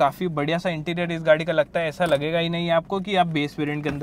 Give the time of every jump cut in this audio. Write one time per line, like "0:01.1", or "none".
none